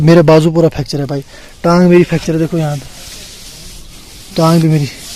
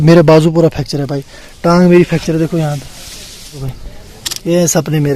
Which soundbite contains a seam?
second; 1 cut; at 3.8 s

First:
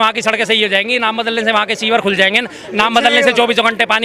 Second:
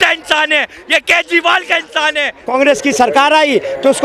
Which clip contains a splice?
second; 1 cut; at 2.5 s

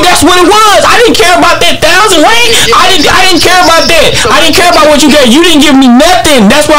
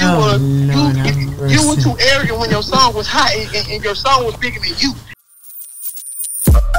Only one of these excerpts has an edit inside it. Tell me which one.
second; 1 cut; at 5.2 s

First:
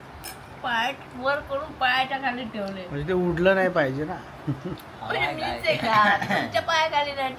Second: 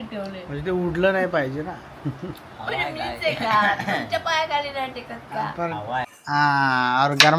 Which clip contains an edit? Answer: second; 1 cut; at 6.1 s

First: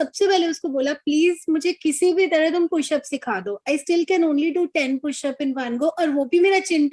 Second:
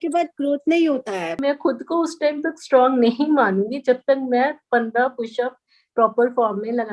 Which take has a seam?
second; 1 cut; at 1.4 s

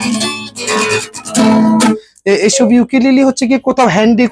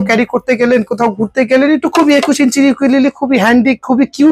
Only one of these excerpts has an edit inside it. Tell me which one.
first; 1 cut; at 2.1 s

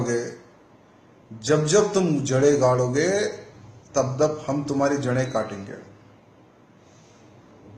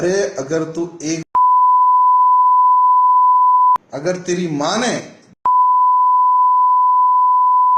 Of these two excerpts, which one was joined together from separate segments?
first; 1 cut; at 5.9 s

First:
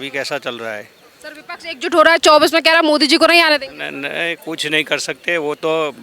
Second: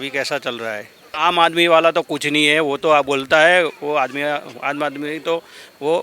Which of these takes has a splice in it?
second; 1 cut; at 1.1 s

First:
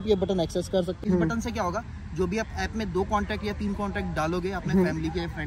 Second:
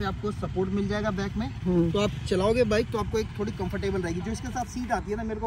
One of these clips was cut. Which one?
first; 1 cut; at 1.0 s

